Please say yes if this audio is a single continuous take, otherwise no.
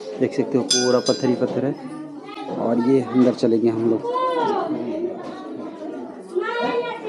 yes